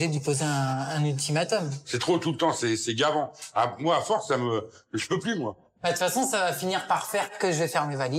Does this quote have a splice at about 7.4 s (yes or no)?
yes